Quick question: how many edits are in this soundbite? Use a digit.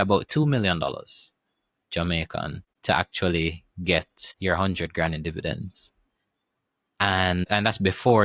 3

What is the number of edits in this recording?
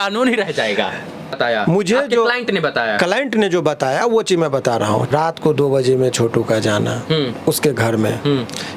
2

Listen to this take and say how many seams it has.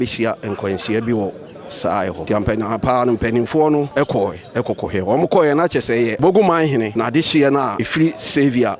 5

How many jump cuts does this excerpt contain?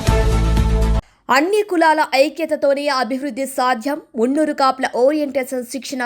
1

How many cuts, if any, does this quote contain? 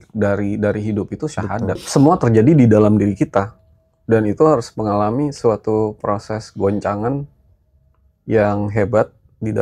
1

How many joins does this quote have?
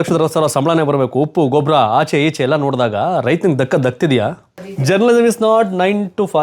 1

